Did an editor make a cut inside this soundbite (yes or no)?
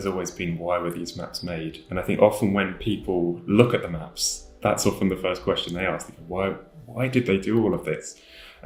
no